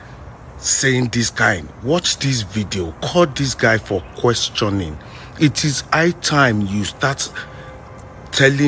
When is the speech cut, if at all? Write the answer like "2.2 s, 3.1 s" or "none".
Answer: none